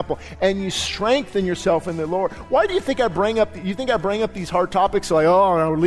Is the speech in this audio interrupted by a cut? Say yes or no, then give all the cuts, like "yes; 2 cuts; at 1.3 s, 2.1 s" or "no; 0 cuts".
no; 0 cuts